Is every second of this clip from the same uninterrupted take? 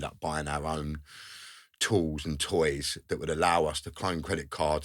yes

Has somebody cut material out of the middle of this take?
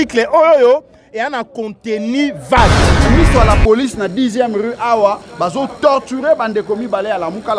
yes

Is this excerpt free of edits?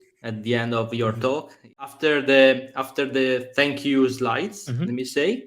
no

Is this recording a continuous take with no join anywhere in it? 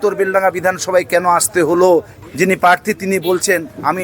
no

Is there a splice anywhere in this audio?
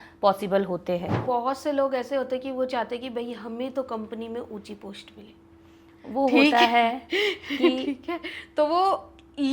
yes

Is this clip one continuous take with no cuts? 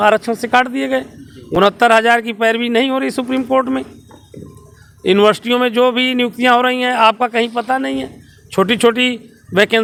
yes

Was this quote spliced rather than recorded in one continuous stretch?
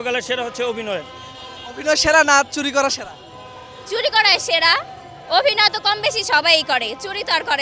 no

